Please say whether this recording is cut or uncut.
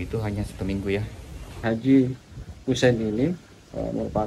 cut